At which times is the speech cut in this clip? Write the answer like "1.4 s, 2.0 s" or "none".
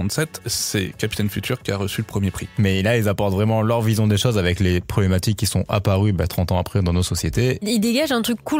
2.4 s, 7.6 s